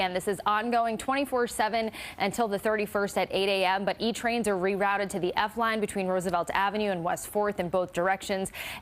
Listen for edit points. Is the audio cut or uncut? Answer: cut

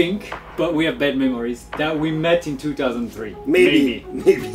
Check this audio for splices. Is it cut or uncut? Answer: uncut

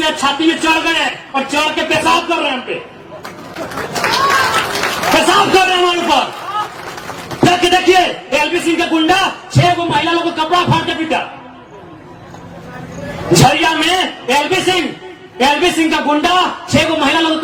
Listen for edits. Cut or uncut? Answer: uncut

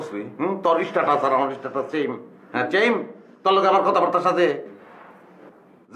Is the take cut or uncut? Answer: uncut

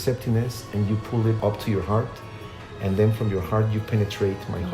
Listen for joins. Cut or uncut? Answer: cut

